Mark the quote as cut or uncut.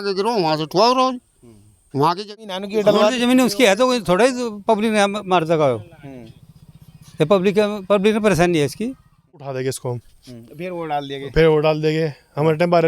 cut